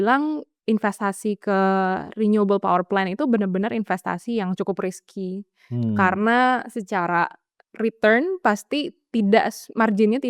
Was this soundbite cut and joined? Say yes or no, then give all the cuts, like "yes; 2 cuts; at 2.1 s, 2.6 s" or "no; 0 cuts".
no; 0 cuts